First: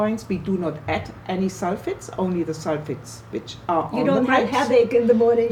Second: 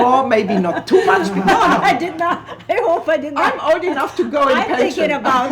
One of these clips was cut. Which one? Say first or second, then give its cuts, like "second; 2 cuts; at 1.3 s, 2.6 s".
second; 1 cut; at 1.3 s